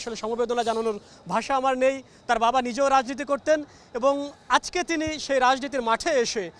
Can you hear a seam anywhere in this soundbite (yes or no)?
no